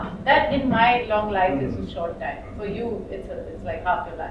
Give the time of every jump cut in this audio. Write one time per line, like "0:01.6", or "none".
none